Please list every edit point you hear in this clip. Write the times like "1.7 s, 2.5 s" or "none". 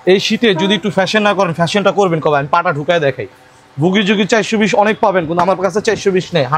none